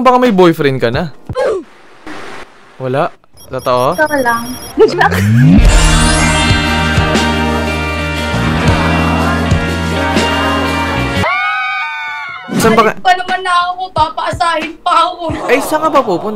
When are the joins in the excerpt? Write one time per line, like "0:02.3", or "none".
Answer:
0:12.6